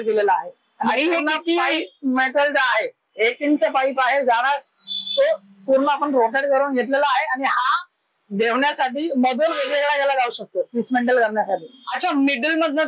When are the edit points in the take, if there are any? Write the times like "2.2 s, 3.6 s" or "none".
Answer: none

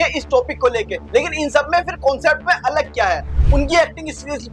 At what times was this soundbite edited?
1.0 s, 3.3 s

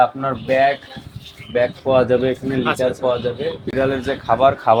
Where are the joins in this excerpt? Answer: none

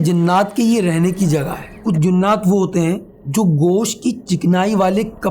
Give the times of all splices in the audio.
1.7 s, 3.1 s

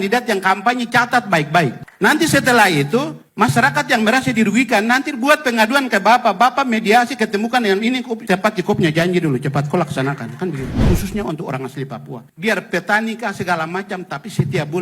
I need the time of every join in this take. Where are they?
1.8 s, 8.2 s, 10.8 s, 12.3 s

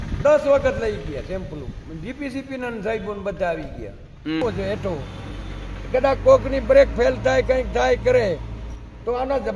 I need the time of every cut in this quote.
4.4 s

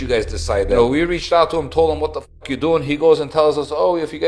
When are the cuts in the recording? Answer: none

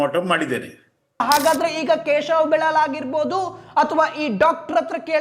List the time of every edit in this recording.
1.2 s

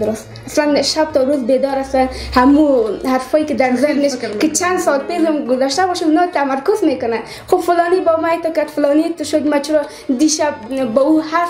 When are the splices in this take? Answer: none

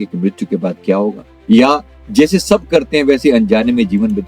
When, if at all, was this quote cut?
1.3 s, 1.9 s

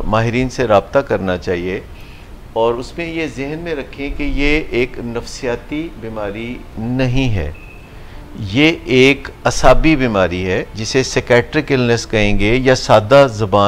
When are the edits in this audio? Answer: none

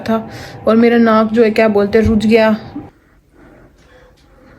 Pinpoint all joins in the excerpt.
2.8 s

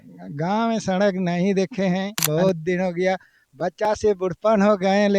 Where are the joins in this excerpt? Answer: 2.3 s

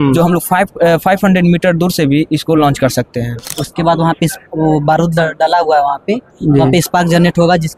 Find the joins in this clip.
3.5 s

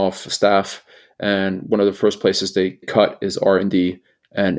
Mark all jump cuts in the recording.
2.8 s

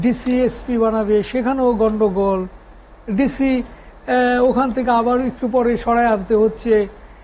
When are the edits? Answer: none

